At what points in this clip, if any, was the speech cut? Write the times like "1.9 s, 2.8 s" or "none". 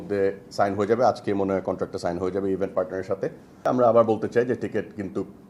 3.6 s